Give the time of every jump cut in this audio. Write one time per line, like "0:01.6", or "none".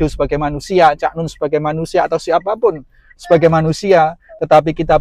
none